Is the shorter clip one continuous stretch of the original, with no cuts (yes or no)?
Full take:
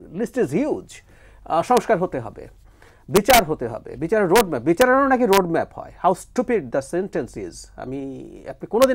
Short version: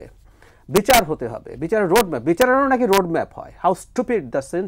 yes